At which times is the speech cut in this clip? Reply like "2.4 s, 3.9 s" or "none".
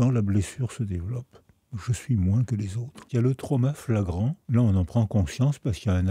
3.0 s, 4.4 s